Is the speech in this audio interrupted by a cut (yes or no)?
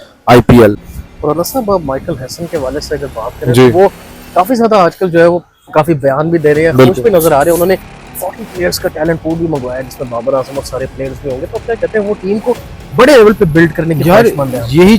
yes